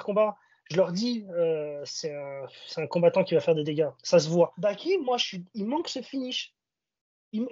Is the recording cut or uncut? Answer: cut